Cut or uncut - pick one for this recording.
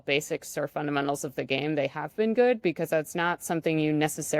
uncut